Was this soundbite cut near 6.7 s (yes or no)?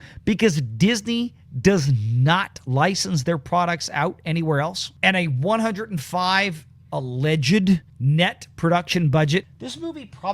no